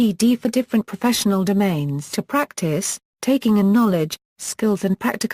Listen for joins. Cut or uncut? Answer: uncut